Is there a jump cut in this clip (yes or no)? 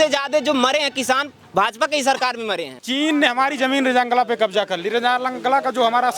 yes